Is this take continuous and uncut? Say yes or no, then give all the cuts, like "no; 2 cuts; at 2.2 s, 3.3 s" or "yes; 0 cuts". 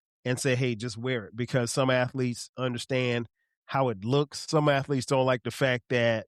yes; 0 cuts